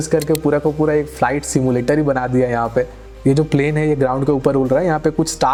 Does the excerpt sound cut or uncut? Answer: uncut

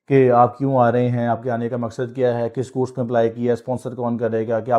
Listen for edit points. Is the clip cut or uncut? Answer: uncut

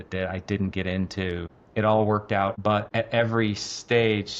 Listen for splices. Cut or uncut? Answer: cut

